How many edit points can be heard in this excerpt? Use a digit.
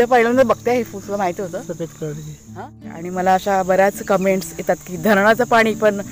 1